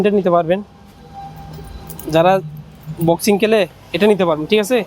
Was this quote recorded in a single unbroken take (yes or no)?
yes